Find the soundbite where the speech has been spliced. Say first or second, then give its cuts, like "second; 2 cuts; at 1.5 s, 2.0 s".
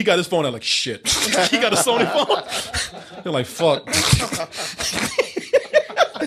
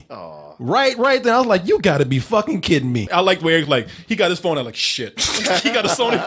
second; 1 cut; at 3.1 s